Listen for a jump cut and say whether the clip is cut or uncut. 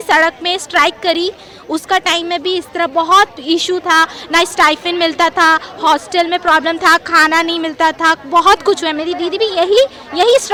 uncut